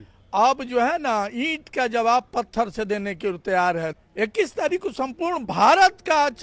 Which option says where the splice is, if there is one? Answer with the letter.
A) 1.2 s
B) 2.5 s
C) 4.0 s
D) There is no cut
C